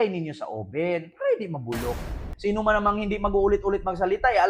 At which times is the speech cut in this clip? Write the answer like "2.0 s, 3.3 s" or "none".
2.3 s